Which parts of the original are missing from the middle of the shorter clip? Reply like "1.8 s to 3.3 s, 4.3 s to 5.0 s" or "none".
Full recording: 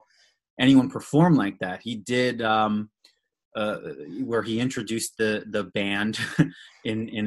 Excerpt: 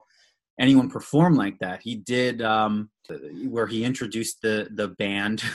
3.2 s to 3.9 s